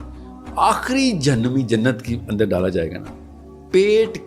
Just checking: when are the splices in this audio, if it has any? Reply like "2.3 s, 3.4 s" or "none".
none